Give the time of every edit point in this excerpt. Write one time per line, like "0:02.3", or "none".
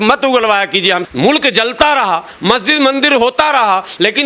0:01.0

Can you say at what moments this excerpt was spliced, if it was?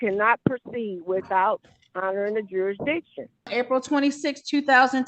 0:03.5

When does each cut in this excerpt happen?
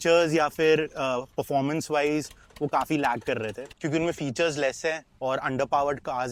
none

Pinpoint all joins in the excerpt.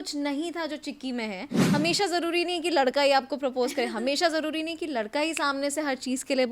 0:01.6

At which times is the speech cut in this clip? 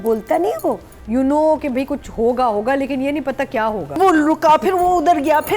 0:00.9
0:04.0

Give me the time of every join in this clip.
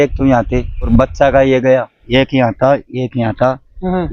0:00.9
0:02.0

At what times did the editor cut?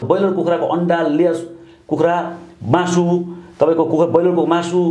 none

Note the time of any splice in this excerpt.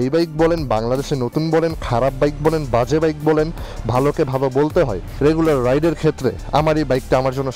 0:05.1

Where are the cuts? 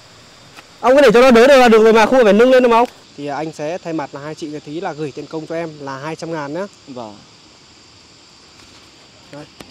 0:03.0

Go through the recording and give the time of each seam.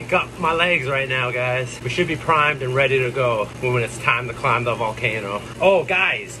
0:01.8
0:03.5
0:05.5

